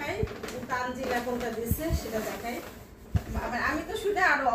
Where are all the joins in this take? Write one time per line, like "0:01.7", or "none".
none